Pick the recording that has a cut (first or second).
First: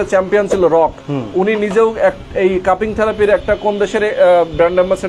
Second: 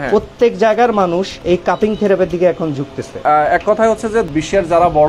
second